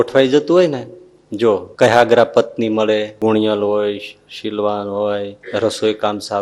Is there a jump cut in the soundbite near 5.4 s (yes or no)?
yes